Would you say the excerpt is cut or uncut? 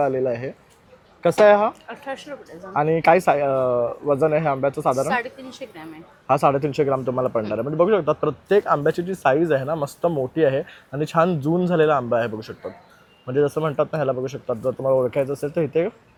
uncut